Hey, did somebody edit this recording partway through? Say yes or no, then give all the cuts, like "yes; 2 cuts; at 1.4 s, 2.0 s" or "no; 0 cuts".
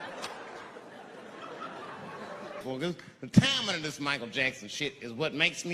yes; 1 cut; at 2.6 s